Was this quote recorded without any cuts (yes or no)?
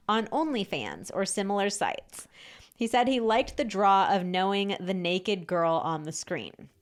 yes